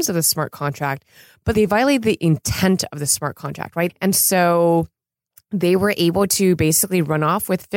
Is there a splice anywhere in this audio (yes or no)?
yes